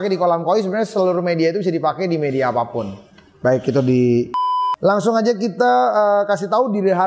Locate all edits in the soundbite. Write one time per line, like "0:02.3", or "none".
0:04.5